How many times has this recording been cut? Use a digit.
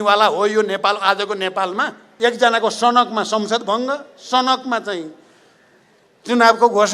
1